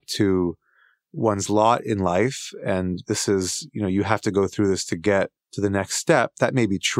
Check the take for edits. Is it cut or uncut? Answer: cut